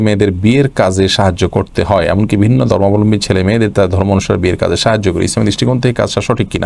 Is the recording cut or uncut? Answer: uncut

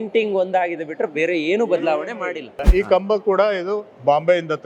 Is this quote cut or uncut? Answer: cut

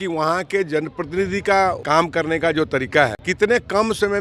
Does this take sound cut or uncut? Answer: cut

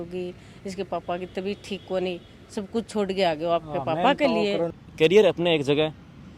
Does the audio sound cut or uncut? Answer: cut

